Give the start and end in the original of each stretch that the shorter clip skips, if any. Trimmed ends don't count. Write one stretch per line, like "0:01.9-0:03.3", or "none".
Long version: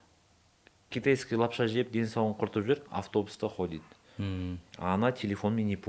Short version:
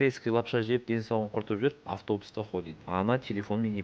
0:03.8-0:04.7